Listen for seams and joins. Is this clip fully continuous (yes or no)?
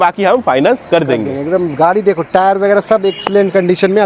yes